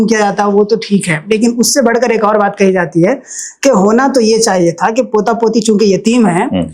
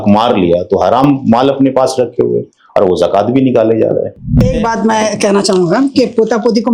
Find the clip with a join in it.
second; 1 cut; at 4.5 s

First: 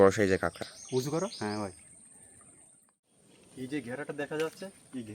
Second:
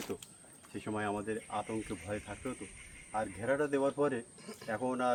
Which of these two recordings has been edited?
first; 1 cut; at 3.1 s

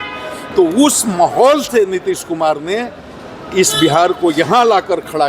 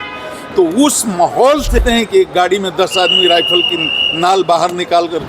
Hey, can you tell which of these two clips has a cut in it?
second; 1 cut; at 1.8 s

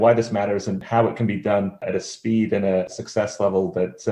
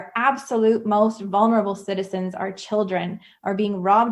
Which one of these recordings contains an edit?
first; 3 cuts; at 0.8 s, 1.9 s, 2.9 s

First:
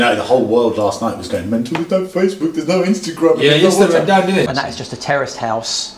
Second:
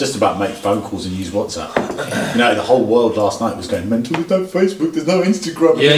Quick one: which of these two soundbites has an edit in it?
first; 1 cut; at 4.5 s

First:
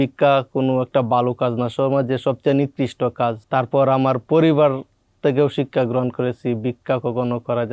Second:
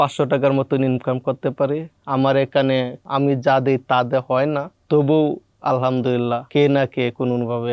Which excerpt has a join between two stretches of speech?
second; 3 cuts; at 3.0 s, 4.7 s, 6.4 s

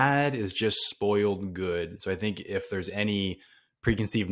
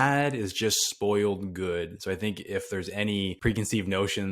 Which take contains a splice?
second; 1 cut; at 3.4 s

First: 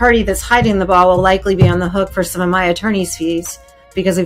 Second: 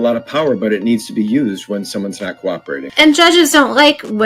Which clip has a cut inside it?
second; 1 cut; at 2.8 s

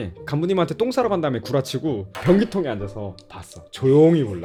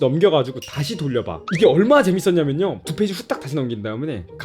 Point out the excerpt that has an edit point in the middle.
second; 2 cuts; at 1.4 s, 2.8 s

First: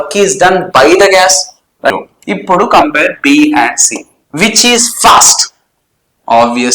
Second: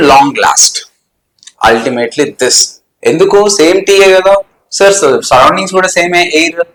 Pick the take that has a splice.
first; 1 cut; at 1.9 s

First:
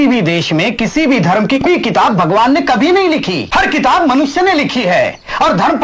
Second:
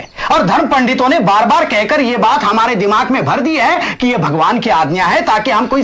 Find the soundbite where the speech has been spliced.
first; 2 cuts; at 1.7 s, 3.4 s

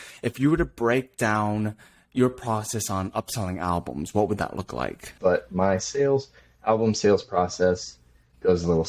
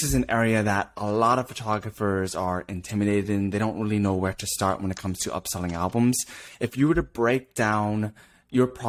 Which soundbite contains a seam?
first; 1 cut; at 5.1 s

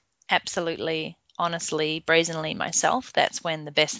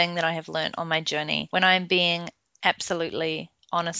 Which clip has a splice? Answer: second; 1 cut; at 1.4 s

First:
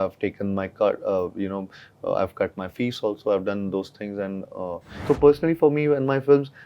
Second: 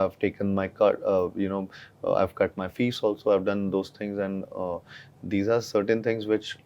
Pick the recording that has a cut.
first; 1 cut; at 5.0 s

